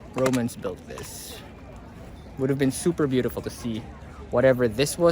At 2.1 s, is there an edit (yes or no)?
yes